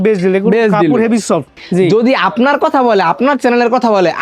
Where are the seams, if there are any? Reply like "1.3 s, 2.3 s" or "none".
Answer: 1.6 s

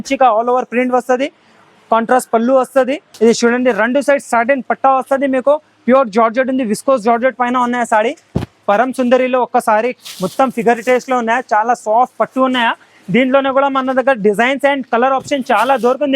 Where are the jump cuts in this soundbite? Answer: 3.1 s, 8.6 s

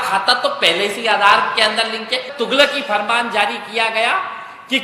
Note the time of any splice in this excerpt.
2.3 s

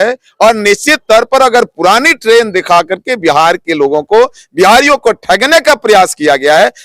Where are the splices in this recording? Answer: none

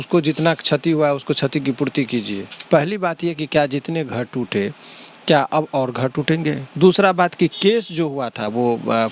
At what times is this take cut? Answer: 2.5 s, 6.7 s

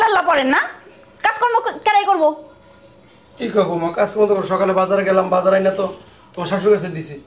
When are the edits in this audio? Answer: none

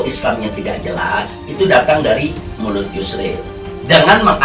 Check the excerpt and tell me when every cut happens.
none

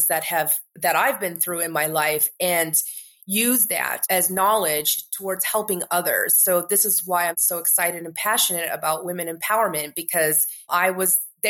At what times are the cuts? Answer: 7.4 s

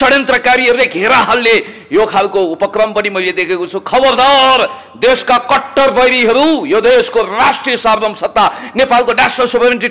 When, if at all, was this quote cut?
none

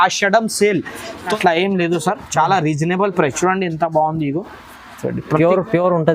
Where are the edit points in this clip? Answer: 1.3 s

